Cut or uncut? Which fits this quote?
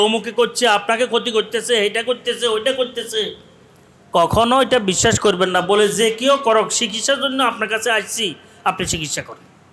uncut